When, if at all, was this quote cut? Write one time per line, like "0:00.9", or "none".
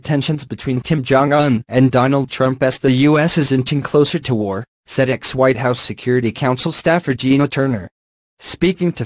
none